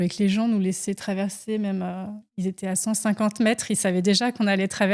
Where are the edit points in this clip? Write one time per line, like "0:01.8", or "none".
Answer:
none